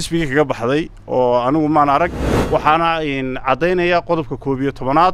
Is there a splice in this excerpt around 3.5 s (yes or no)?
no